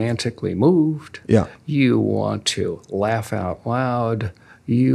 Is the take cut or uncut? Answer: uncut